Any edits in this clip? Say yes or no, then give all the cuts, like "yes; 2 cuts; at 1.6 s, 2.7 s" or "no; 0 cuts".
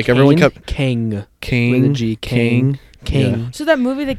no; 0 cuts